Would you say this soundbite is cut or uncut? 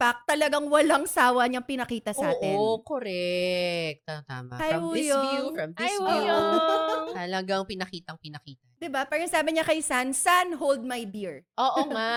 uncut